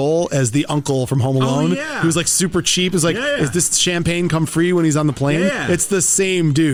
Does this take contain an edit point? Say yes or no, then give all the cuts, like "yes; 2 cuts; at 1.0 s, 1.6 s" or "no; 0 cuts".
no; 0 cuts